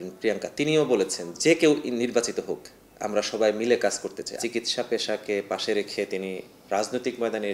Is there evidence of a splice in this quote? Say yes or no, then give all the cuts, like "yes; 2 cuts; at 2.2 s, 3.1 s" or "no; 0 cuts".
yes; 3 cuts; at 1.2 s, 4.4 s, 6.5 s